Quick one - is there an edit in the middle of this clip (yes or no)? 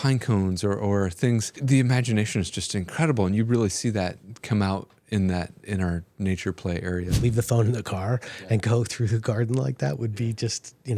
yes